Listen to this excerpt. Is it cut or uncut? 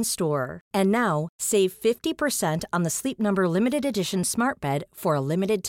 uncut